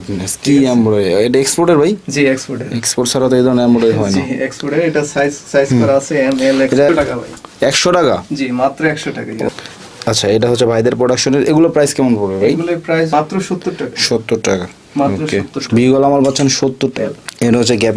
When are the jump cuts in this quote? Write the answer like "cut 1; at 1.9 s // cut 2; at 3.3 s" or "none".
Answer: cut 1; at 6.9 s // cut 2; at 9.5 s // cut 3; at 13.1 s // cut 4; at 16.9 s